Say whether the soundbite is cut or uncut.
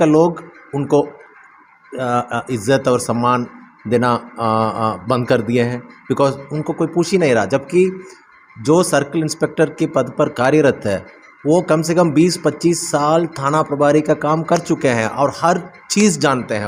uncut